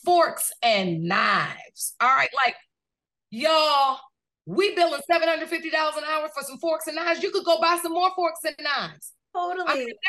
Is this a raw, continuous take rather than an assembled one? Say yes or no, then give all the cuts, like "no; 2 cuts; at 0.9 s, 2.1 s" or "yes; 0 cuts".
yes; 0 cuts